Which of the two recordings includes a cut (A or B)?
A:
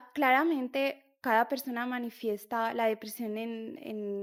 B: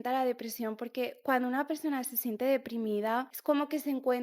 B